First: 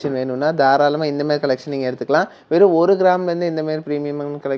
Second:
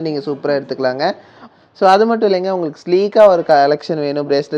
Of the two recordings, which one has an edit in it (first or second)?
second